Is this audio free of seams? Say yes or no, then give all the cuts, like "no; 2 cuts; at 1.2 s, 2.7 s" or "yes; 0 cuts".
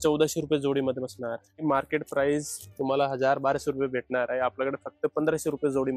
no; 1 cut; at 1.6 s